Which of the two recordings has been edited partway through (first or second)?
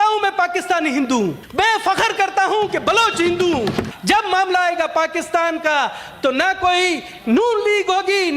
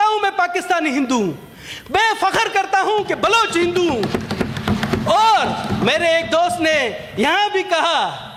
first